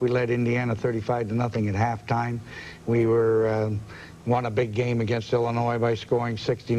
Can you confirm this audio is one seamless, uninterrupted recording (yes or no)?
yes